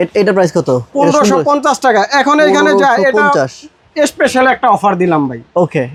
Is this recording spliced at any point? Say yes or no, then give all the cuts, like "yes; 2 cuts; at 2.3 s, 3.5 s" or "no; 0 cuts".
no; 0 cuts